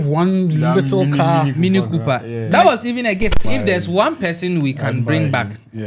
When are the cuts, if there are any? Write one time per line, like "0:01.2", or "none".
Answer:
0:03.5

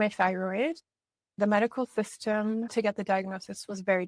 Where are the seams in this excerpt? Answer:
0:01.3
0:02.7

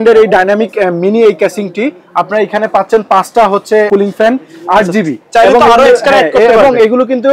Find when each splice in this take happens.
0:03.9

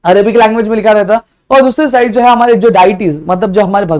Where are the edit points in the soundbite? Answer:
none

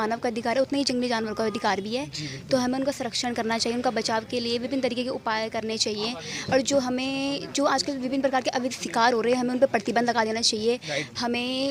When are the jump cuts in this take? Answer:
none

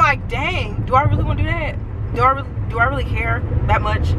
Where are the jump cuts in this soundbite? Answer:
none

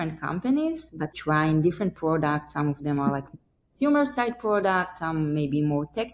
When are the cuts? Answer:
0:01.2

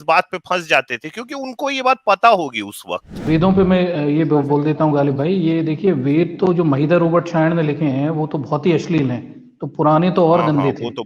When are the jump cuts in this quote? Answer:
0:03.2

